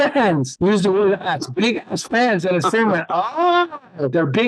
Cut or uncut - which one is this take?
uncut